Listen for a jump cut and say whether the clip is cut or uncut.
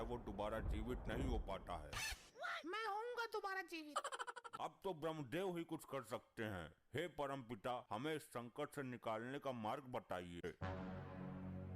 cut